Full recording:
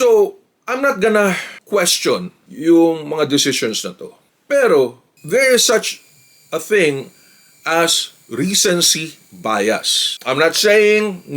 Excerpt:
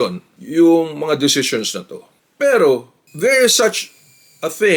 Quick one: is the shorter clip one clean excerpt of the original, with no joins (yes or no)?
yes